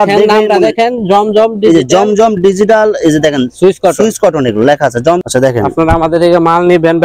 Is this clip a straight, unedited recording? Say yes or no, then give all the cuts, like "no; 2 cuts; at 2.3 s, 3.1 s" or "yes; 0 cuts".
no; 1 cut; at 5.2 s